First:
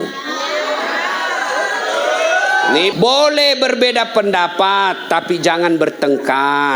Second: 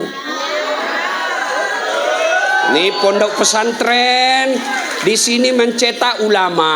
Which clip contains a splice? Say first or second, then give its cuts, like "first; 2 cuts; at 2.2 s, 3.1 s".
first; 1 cut; at 2.9 s